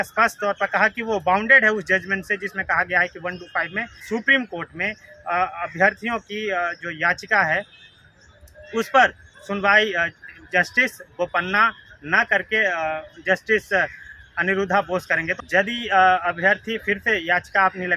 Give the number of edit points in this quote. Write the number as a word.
two